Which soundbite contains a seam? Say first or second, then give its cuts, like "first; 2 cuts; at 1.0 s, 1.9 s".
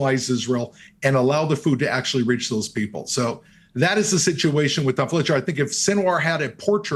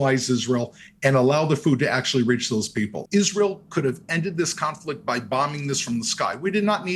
second; 1 cut; at 3.0 s